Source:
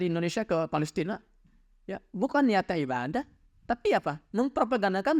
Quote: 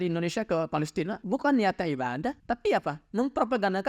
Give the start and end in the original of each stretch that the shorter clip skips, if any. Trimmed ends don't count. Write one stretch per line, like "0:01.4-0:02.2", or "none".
0:01.2-0:02.1
0:03.3-0:03.6